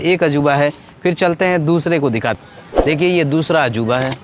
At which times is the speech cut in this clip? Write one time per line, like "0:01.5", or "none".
0:02.4